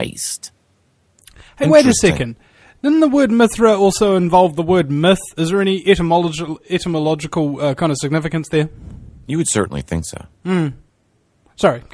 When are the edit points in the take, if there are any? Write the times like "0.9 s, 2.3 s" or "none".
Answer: none